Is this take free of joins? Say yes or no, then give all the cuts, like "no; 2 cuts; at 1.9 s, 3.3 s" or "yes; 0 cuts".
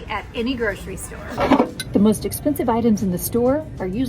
no; 1 cut; at 1.2 s